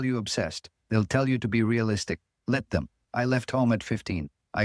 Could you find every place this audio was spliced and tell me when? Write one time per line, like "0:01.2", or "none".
0:03.0